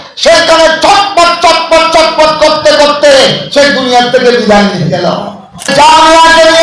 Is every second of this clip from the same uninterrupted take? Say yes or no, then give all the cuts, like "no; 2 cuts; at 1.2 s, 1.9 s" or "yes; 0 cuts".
no; 1 cut; at 5.7 s